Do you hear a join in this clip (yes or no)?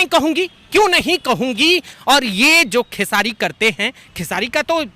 yes